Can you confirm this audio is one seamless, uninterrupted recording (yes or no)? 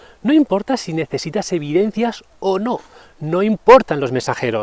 yes